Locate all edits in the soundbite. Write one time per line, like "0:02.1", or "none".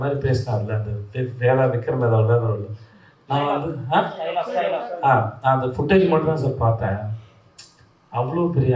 none